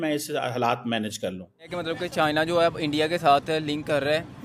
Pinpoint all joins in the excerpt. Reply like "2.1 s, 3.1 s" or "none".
1.8 s